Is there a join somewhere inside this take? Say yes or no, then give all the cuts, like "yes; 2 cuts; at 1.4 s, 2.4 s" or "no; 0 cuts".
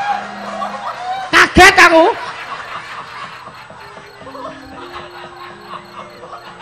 no; 0 cuts